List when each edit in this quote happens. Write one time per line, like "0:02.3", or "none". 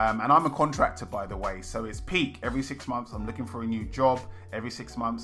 none

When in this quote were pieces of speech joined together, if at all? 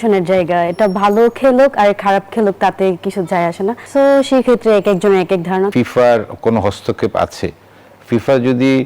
0:03.8
0:05.7

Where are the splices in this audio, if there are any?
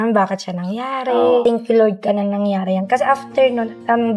0:01.4

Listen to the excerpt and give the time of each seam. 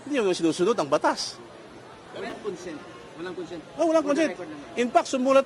0:02.3

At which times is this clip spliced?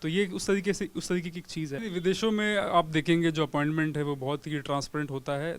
0:01.7

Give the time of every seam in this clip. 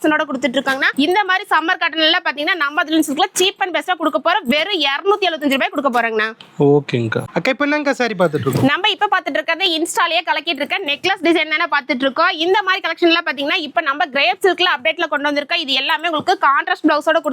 none

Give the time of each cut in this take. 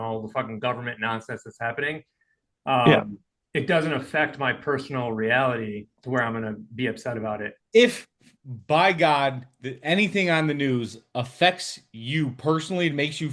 0:05.9
0:07.5

